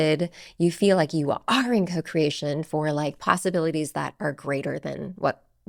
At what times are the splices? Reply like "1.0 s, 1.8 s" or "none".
none